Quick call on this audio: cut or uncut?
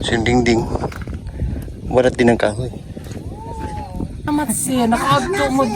cut